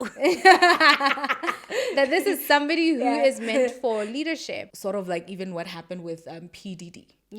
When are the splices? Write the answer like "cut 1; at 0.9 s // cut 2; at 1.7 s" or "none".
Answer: cut 1; at 4.7 s